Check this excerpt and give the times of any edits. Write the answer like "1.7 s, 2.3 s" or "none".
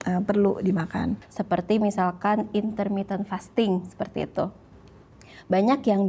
1.2 s